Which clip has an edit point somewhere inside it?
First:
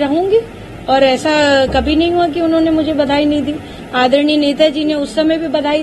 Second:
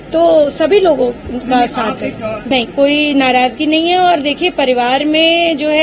second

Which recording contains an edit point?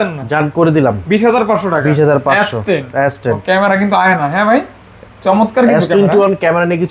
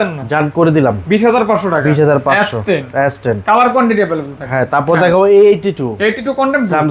first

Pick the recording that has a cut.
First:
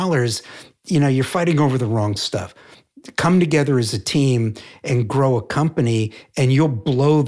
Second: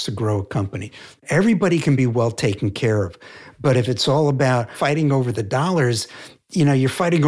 second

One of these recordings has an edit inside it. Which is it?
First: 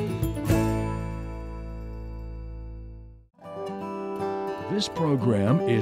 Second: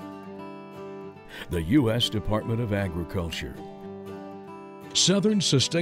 first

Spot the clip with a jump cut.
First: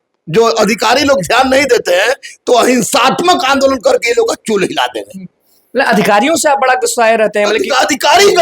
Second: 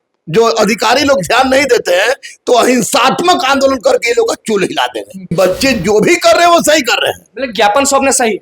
second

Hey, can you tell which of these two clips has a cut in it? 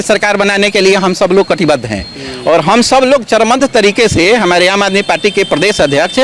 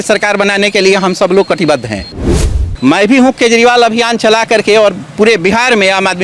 second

